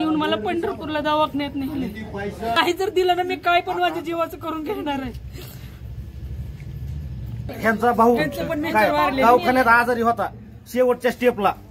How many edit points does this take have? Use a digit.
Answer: 2